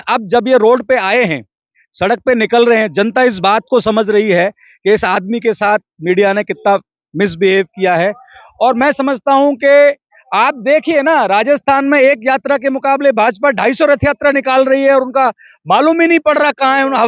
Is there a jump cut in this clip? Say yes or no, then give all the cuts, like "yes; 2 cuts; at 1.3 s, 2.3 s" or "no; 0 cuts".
no; 0 cuts